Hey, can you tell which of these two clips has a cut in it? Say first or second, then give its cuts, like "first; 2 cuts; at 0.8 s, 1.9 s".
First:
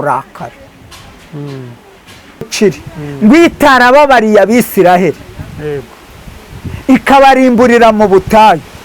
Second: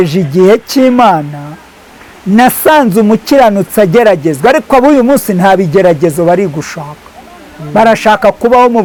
first; 1 cut; at 2.5 s